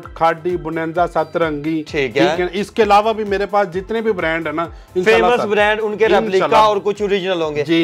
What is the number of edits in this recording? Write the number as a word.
zero